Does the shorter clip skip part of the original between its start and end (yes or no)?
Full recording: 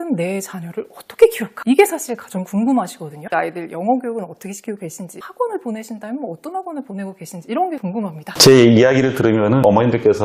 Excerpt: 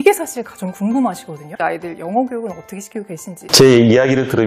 yes